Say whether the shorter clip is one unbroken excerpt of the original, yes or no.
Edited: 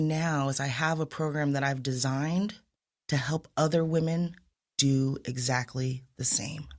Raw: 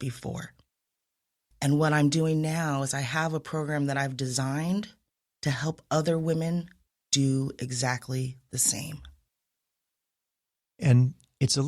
yes